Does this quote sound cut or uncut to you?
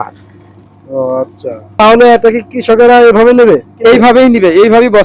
cut